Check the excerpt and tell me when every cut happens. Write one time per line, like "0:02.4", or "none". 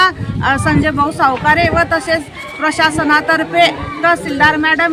none